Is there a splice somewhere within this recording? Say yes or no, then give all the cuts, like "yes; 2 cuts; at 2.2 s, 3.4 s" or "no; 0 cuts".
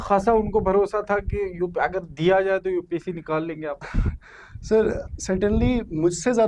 no; 0 cuts